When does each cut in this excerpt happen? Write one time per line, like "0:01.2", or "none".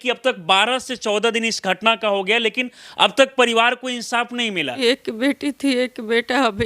0:04.6